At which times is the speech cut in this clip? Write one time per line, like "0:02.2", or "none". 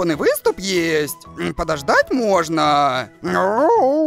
none